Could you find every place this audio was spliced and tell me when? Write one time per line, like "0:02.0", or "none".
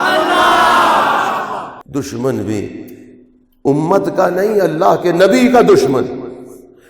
0:01.6